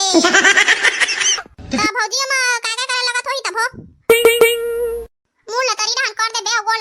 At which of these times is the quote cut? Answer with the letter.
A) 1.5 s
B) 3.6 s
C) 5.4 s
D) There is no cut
A